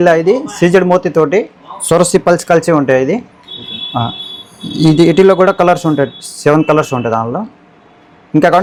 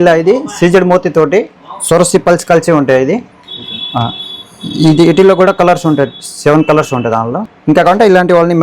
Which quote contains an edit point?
second; 1 cut; at 7.5 s

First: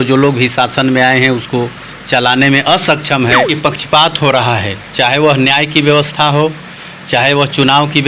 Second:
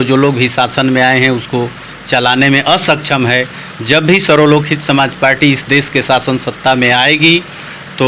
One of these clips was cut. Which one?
first; 1 cut; at 3.5 s

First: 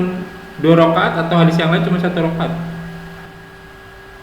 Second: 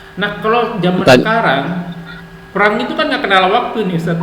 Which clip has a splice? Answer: first; 1 cut; at 3.3 s

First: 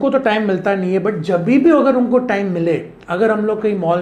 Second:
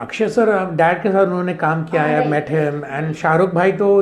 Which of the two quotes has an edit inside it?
second; 1 cut; at 2.2 s

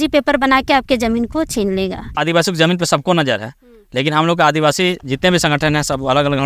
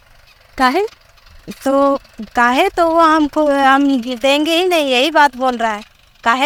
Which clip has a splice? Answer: first; 1 cut; at 2.2 s

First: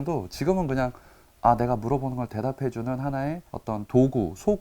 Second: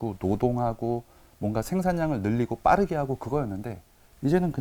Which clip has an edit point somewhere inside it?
first; 1 cut; at 3.5 s

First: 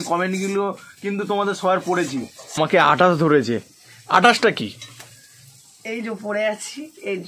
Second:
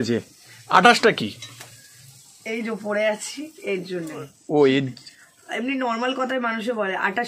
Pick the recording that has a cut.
first; 1 cut; at 2.4 s

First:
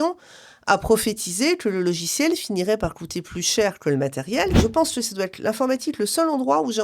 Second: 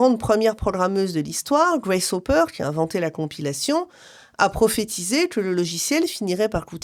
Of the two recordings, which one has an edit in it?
first; 1 cut; at 4.6 s

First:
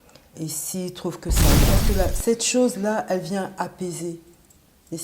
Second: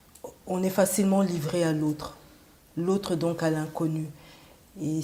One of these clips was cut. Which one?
first; 1 cut; at 1.6 s

